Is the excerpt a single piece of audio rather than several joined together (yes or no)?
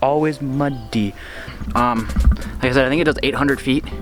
no